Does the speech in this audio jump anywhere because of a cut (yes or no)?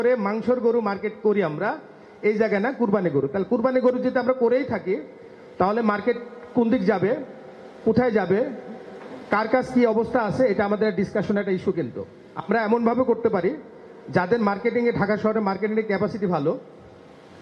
no